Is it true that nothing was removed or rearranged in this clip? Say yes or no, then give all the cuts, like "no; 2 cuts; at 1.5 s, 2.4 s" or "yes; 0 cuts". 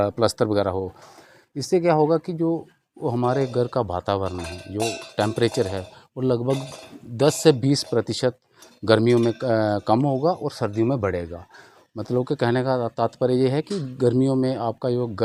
yes; 0 cuts